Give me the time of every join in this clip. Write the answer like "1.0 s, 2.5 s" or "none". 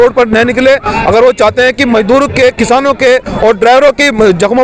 none